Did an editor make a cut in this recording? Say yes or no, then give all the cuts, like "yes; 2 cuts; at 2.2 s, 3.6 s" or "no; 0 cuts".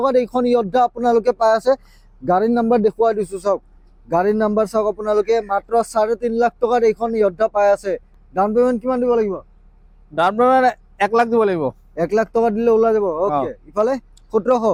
no; 0 cuts